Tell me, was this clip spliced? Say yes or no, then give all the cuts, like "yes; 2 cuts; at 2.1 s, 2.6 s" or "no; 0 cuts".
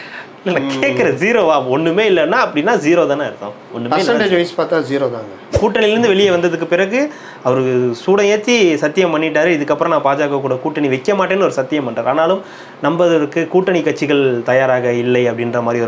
yes; 1 cut; at 5.5 s